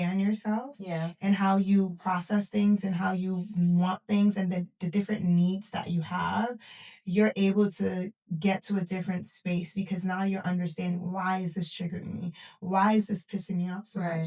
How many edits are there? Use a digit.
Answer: 0